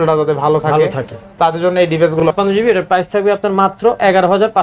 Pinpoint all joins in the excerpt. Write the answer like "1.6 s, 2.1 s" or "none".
2.2 s